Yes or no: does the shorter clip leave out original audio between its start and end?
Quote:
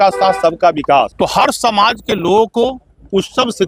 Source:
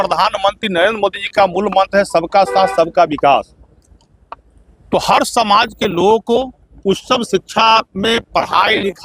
yes